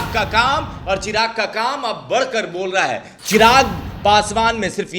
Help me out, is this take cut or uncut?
cut